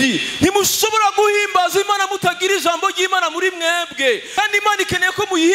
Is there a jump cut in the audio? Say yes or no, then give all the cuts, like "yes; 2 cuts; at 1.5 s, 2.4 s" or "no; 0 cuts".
yes; 1 cut; at 4.3 s